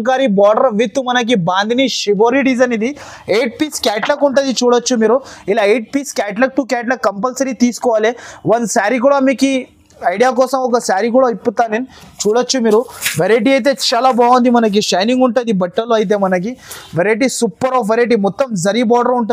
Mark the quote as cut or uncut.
uncut